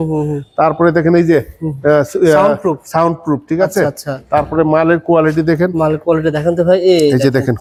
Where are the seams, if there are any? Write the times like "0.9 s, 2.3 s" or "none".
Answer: none

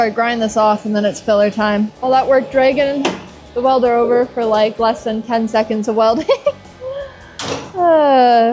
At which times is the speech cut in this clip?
none

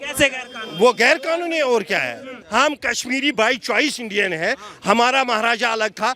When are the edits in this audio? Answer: 2.3 s

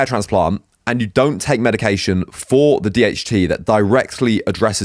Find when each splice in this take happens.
none

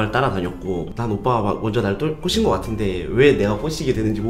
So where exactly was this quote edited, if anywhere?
none

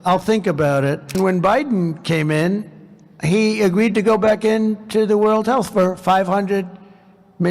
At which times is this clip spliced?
1.2 s

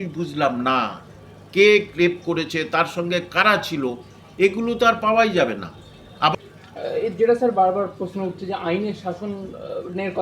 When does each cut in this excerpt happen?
6.3 s

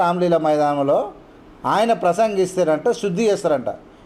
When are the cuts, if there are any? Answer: none

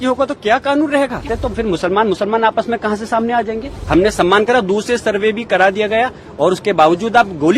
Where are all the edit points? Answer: 1.3 s, 3.7 s

